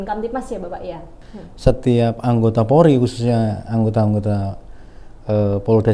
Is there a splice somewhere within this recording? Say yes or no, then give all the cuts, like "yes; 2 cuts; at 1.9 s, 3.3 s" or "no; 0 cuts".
yes; 1 cut; at 1.1 s